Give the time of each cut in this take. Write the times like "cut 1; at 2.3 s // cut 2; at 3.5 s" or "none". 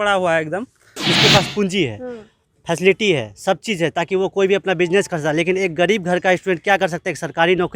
cut 1; at 1.0 s